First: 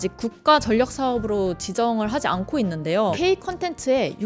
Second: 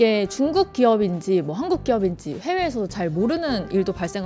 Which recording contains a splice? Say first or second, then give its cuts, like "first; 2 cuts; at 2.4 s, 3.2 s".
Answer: first; 1 cut; at 3.1 s